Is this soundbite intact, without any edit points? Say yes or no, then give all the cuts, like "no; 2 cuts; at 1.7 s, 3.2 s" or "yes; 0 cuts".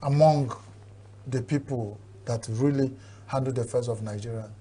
yes; 0 cuts